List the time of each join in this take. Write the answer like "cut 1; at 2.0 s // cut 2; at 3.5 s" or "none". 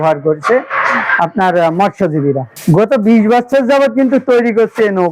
cut 1; at 2.5 s